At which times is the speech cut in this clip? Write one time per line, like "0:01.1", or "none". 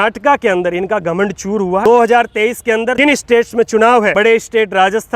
0:01.8
0:02.9
0:04.1